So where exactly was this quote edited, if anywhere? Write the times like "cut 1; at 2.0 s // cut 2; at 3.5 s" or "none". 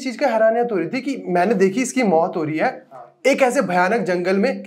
none